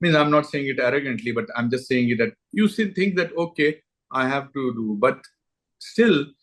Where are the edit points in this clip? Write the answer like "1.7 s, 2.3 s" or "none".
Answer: none